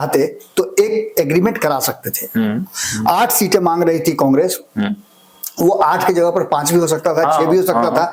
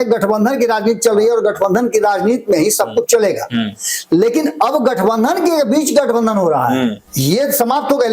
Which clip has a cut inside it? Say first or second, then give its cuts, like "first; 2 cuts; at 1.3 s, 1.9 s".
second; 1 cut; at 7.1 s